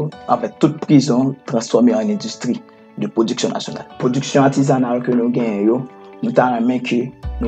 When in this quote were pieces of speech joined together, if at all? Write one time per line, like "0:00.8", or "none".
none

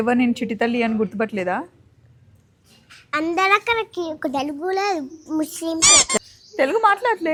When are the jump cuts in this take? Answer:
none

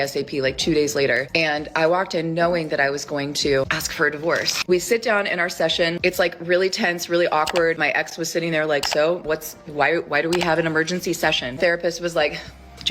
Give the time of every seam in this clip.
none

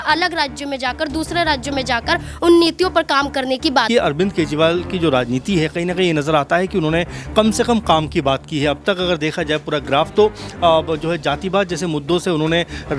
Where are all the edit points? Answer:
0:03.9
0:05.1

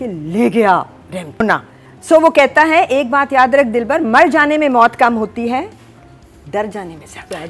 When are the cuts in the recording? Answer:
0:01.4

